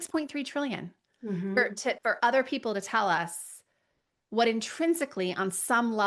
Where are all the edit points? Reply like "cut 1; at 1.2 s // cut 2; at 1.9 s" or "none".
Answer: none